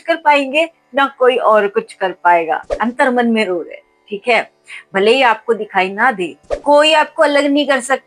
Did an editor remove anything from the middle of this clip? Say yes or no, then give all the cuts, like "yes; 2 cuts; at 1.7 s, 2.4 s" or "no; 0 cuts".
yes; 2 cuts; at 2.8 s, 6.4 s